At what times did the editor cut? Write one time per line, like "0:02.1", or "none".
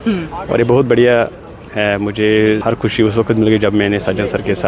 0:02.6